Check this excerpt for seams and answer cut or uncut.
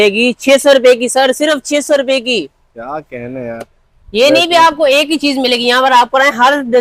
uncut